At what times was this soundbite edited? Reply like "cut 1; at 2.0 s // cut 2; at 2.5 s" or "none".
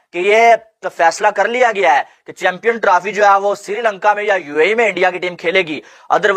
none